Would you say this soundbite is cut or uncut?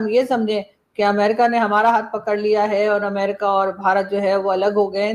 uncut